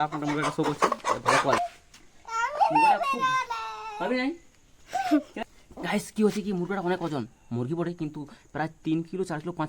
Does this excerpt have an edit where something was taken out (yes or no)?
yes